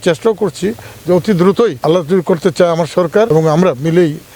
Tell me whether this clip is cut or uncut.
cut